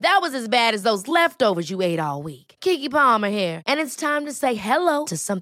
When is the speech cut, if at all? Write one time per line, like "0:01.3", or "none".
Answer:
none